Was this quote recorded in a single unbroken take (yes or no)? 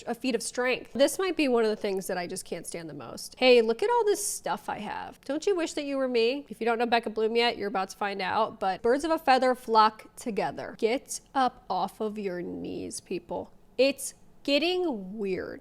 no